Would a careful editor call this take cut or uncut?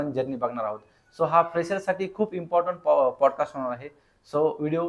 uncut